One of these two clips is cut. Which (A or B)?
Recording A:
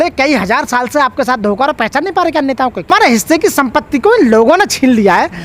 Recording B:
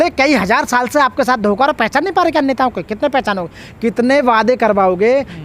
A